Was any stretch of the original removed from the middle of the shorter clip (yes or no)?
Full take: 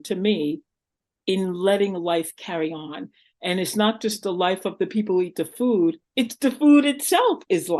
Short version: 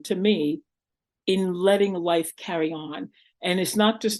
no